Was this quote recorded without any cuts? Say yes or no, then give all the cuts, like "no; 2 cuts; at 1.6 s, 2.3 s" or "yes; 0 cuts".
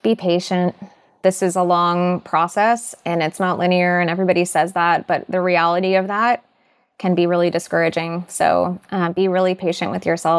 no; 1 cut; at 1.1 s